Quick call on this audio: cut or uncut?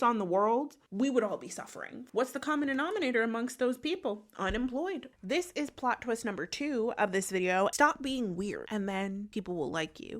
cut